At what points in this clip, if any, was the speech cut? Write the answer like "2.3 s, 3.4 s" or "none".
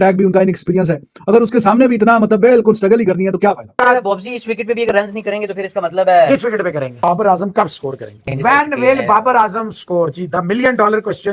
3.7 s, 6.9 s